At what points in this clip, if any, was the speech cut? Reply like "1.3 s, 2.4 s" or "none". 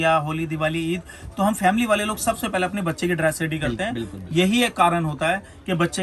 none